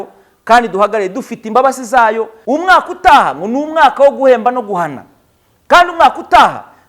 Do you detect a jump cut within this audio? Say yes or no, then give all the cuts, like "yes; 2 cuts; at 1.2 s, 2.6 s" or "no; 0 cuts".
yes; 1 cut; at 2.3 s